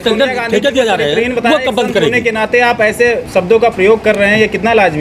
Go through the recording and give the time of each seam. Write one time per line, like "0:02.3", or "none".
none